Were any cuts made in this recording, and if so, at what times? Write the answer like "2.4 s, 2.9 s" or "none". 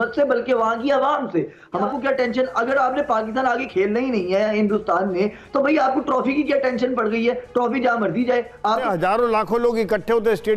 1.9 s, 8.8 s